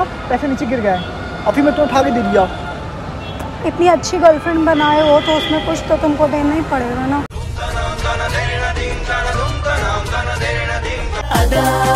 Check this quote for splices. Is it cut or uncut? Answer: uncut